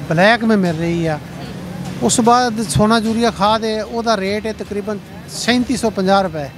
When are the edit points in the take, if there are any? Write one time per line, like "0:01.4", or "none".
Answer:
none